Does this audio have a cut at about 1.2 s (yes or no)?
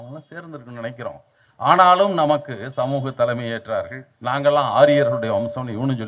no